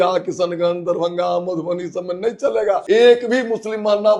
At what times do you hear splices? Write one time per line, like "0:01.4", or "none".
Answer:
0:02.8